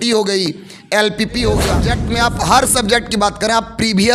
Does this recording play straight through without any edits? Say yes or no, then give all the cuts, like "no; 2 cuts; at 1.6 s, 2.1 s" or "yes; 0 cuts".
no; 1 cut; at 1.9 s